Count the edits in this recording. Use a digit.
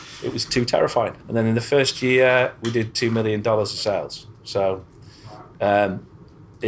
1